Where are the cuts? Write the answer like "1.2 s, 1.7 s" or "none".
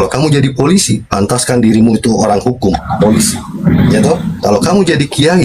none